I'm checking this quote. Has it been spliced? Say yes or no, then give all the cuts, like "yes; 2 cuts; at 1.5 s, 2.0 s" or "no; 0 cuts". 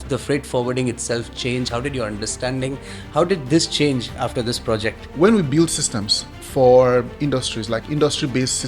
yes; 1 cut; at 5.0 s